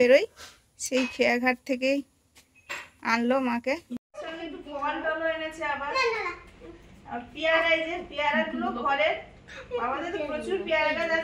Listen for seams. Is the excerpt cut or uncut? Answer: cut